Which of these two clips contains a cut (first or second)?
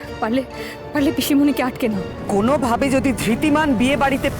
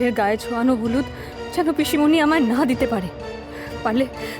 first